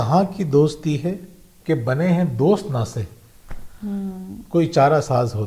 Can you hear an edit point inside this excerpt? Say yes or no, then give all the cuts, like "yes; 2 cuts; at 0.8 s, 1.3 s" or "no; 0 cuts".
no; 0 cuts